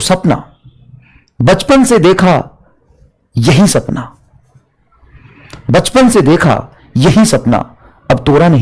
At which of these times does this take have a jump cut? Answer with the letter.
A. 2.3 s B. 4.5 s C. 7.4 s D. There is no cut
D